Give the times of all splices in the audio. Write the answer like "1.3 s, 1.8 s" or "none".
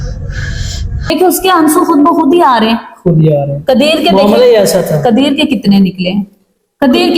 0.9 s